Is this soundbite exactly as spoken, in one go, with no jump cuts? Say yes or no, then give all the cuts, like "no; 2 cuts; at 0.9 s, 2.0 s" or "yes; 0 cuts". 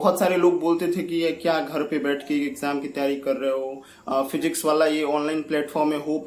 yes; 0 cuts